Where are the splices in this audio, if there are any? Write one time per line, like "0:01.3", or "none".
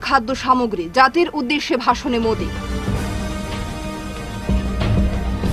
none